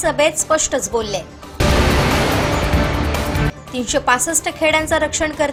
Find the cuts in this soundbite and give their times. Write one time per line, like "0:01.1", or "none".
none